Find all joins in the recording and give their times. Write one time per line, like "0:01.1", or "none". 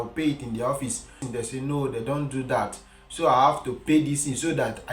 0:01.2